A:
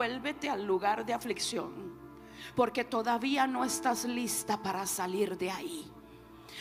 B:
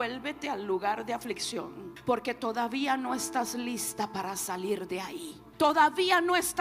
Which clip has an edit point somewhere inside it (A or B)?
B